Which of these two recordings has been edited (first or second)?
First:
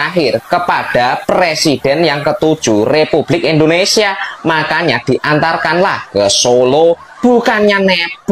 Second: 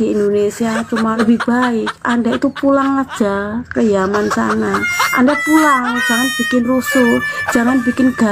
second